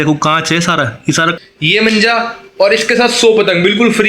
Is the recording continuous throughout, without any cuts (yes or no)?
no